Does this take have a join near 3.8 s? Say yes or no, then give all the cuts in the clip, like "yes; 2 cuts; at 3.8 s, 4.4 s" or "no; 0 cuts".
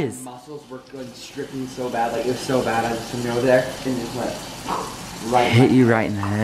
yes; 1 cut; at 3.8 s